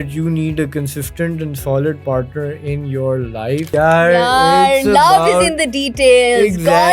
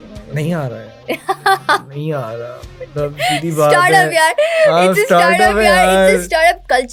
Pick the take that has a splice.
first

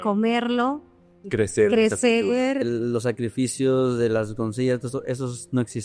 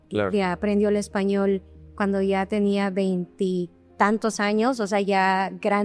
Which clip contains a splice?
first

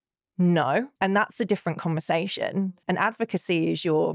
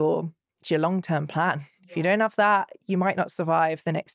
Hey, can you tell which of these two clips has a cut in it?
first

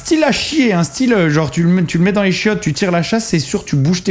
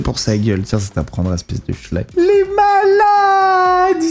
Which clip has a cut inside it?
second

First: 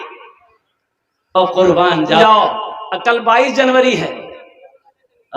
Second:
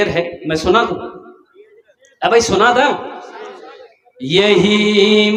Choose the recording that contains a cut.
first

